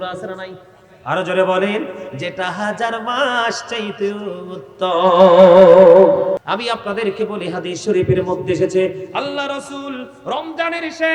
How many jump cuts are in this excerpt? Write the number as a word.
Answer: one